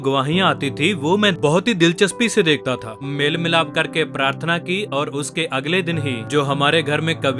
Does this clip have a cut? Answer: yes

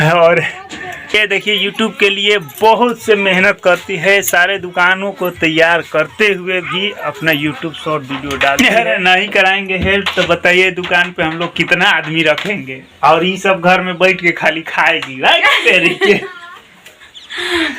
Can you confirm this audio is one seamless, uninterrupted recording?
no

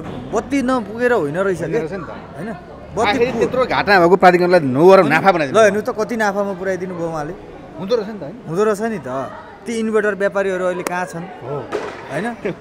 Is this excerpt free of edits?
yes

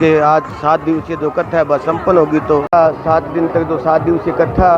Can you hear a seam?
yes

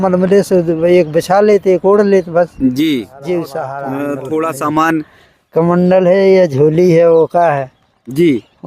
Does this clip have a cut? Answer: yes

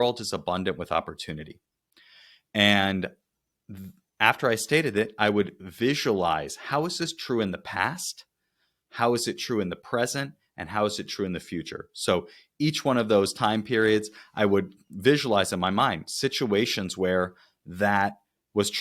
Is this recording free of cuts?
yes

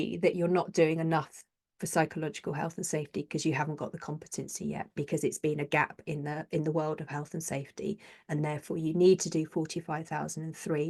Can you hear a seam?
no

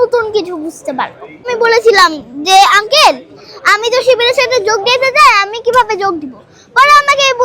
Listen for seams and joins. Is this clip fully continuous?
no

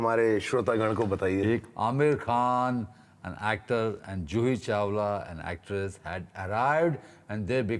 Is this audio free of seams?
no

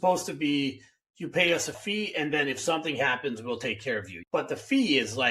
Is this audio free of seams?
no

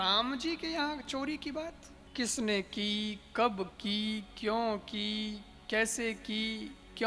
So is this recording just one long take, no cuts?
no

